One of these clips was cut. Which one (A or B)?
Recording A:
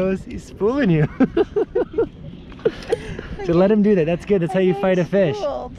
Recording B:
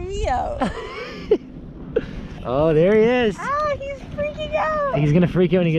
B